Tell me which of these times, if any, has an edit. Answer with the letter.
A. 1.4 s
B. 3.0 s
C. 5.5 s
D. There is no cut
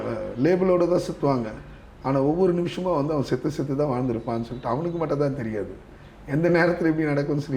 D